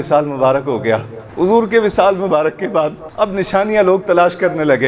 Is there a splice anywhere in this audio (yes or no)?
yes